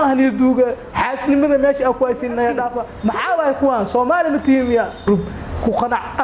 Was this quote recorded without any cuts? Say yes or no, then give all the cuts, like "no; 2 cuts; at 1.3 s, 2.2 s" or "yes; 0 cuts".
no; 2 cuts; at 2.8 s, 5.1 s